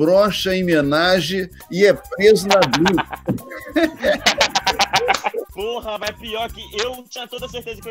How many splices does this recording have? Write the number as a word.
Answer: one